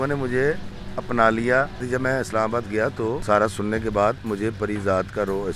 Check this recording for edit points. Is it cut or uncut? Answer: cut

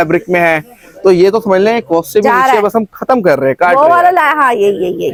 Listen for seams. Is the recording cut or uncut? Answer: uncut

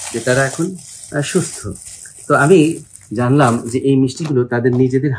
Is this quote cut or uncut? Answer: uncut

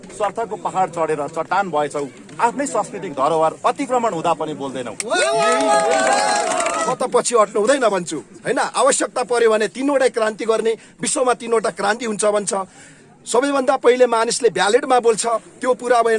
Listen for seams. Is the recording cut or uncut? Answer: cut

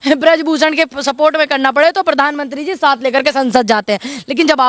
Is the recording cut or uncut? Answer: uncut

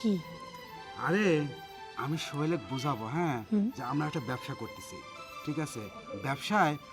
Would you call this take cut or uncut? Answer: uncut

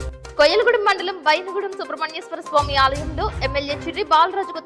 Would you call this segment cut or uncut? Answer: uncut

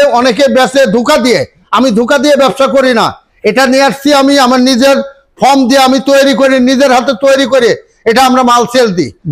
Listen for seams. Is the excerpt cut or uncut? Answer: uncut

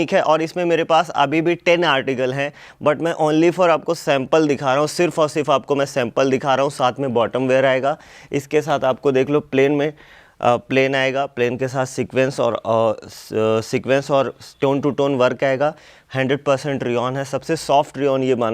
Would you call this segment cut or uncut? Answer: uncut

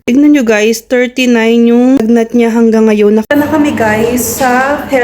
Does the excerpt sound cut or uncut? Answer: cut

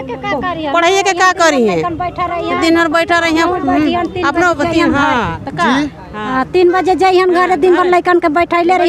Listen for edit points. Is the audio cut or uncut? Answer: uncut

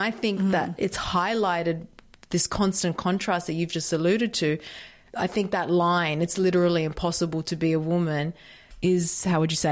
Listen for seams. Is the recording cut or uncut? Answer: uncut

